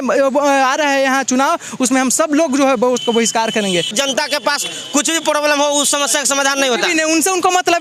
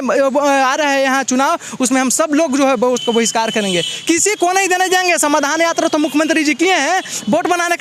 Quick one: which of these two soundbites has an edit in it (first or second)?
first